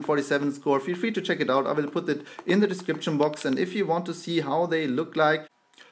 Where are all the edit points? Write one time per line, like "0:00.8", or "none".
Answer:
0:04.3